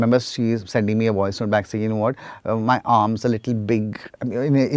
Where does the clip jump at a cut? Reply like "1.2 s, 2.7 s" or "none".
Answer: none